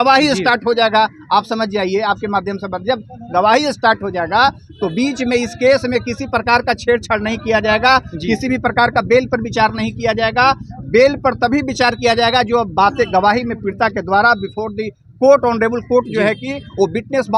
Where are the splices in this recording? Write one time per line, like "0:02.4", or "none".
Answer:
none

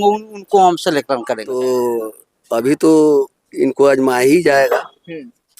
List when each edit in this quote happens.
0:01.4

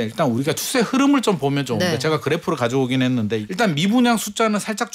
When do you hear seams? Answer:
0:03.4

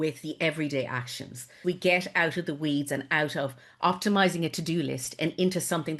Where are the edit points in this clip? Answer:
0:01.5

